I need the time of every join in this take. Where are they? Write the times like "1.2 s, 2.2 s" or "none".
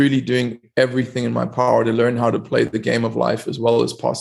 none